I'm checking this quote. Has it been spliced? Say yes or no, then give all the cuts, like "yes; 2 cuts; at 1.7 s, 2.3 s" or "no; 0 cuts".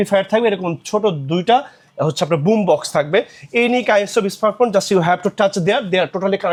no; 0 cuts